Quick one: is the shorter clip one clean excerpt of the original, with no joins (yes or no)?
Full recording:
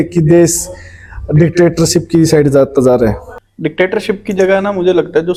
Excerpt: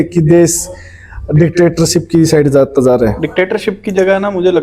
no